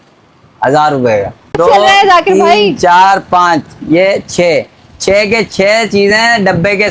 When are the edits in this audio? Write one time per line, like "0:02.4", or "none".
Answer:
0:01.5